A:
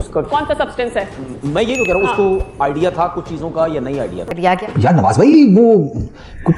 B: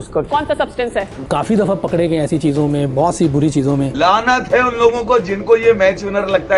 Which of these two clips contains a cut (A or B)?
B